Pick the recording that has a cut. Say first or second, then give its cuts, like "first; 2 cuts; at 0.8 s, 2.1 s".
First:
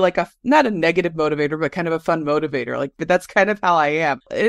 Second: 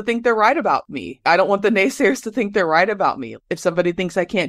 second; 2 cuts; at 1.2 s, 3.3 s